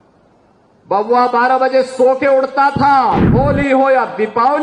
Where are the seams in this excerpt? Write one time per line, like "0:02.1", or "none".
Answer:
0:03.3